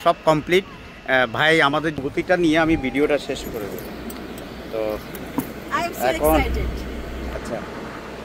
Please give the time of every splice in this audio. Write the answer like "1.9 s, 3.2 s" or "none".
2.0 s